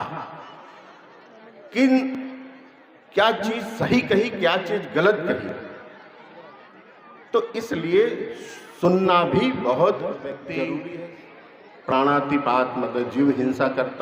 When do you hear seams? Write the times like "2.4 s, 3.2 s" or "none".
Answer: 10.8 s